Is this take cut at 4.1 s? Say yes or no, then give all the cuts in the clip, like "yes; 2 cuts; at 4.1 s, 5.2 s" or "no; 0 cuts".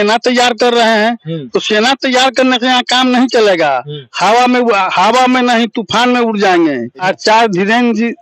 no; 1 cut; at 7.0 s